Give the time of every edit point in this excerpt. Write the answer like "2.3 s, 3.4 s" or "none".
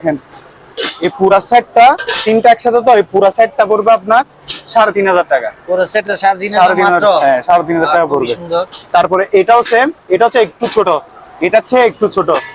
none